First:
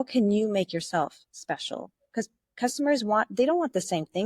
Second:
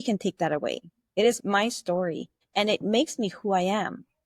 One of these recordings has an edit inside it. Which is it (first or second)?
second